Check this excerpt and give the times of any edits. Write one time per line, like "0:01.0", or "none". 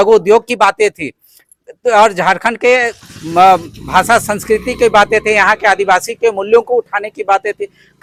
none